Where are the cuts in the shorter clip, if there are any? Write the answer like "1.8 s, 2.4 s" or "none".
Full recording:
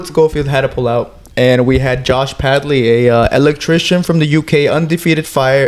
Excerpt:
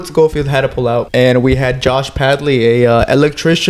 1.1 s